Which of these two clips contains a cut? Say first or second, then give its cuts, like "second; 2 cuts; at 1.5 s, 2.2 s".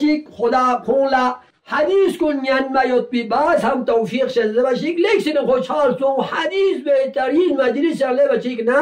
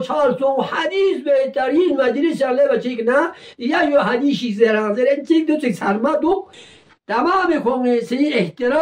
second; 1 cut; at 6.6 s